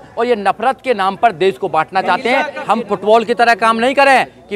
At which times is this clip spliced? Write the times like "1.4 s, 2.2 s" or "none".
2.5 s

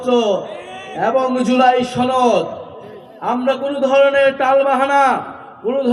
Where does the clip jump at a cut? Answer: none

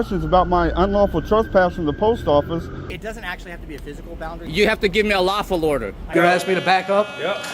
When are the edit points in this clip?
3.0 s, 4.4 s, 6.1 s

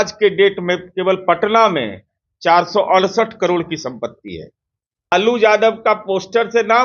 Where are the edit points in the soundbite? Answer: 5.1 s

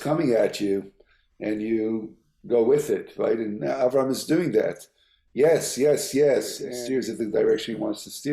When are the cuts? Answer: 6.7 s

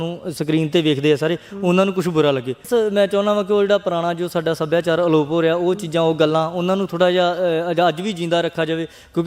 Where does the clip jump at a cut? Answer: 2.7 s

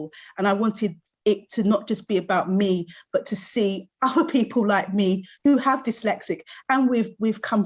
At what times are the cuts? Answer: none

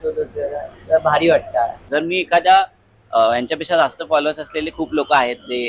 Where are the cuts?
1.8 s

